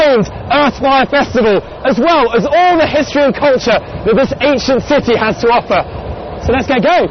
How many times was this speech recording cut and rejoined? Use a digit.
1